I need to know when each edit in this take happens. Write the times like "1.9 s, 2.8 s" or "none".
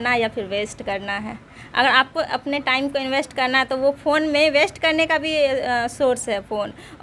none